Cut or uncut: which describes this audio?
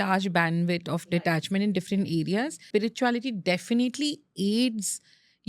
cut